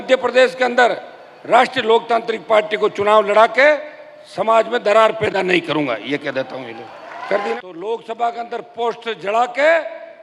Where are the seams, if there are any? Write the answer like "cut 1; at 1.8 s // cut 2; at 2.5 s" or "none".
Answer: cut 1; at 7.5 s